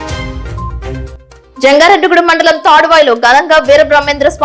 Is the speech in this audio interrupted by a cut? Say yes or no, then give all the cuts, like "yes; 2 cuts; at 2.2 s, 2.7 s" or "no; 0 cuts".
yes; 1 cut; at 1.0 s